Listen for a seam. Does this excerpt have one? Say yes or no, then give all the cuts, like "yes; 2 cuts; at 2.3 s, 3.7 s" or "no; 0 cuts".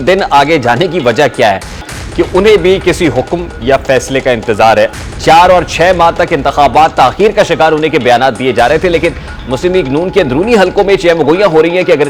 yes; 2 cuts; at 1.9 s, 5.1 s